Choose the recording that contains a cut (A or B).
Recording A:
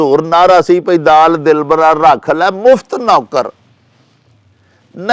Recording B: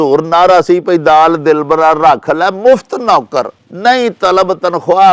B